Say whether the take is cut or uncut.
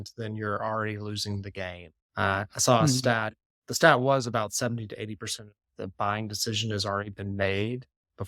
uncut